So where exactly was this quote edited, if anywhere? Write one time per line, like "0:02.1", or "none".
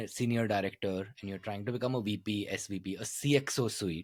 none